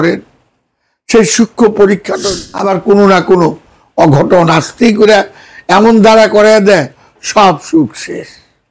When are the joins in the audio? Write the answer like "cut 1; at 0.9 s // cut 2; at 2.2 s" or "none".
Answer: cut 1; at 2.1 s

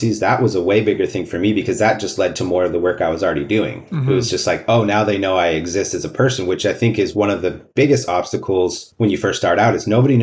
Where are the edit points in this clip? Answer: none

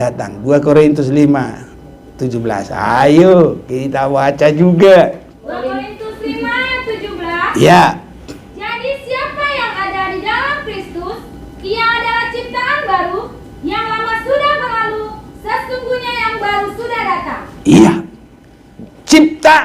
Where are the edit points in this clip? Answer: cut 1; at 5.4 s

